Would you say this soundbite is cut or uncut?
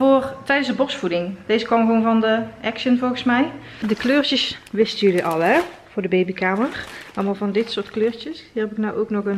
cut